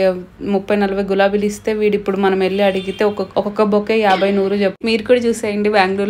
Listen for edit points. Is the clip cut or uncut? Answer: cut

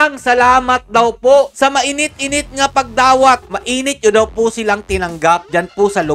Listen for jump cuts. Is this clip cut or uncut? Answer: cut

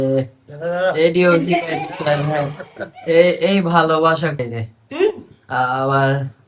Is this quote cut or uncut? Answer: cut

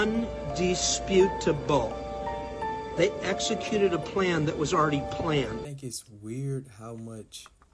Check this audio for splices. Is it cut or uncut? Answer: cut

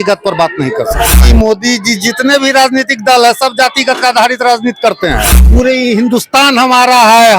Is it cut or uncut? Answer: cut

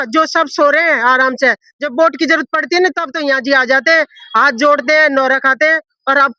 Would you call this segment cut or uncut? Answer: uncut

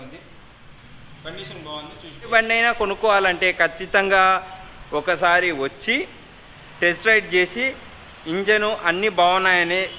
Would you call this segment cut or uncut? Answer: cut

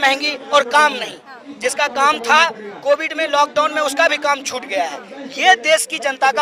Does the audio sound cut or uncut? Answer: uncut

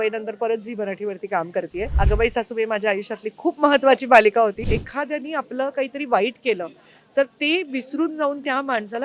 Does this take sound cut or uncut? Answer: cut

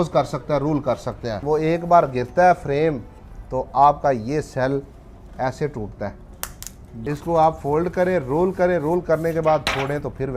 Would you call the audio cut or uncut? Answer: cut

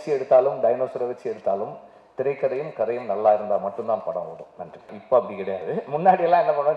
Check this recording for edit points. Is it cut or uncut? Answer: cut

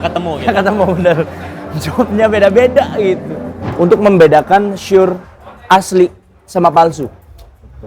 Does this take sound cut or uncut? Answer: cut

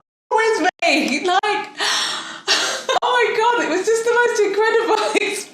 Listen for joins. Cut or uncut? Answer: cut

